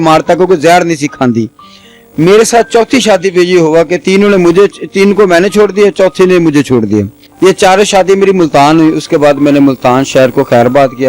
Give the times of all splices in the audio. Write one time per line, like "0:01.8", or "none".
0:07.2